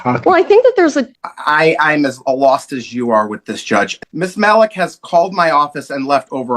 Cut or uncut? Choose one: cut